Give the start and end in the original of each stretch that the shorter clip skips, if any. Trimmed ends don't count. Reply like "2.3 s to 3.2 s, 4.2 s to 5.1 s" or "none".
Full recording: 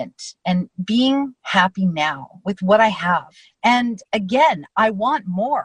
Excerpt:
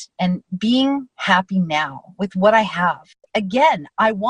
3.5 s to 4.0 s